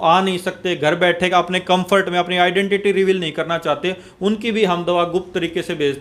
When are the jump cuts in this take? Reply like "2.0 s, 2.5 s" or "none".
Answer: none